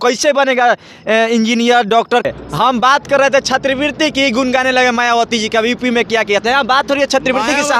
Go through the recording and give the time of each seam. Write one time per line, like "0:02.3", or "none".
0:02.3

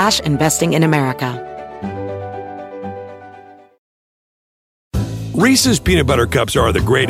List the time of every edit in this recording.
0:01.4

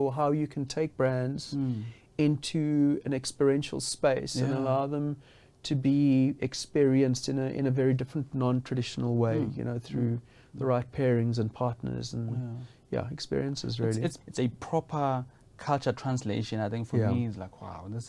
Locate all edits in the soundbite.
0:14.2

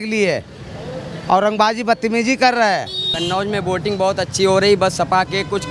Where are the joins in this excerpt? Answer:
0:03.1

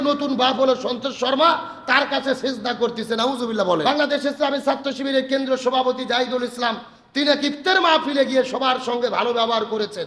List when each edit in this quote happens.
0:03.8

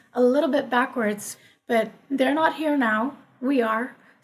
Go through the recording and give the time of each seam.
0:01.3

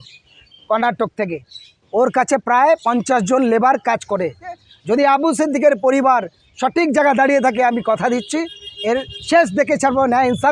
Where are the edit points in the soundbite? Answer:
0:04.7

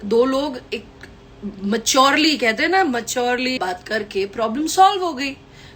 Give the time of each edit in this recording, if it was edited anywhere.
0:03.6

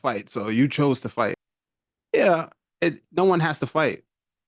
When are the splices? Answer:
0:01.4

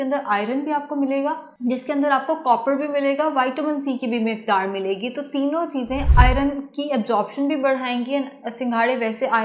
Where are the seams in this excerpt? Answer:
none

